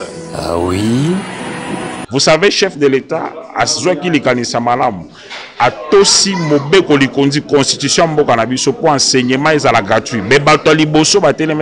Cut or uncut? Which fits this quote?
cut